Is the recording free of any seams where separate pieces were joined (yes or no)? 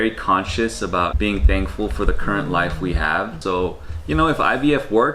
no